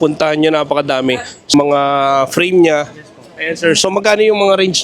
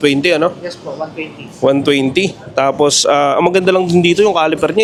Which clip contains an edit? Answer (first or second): first